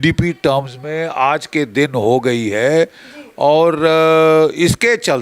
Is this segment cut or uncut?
uncut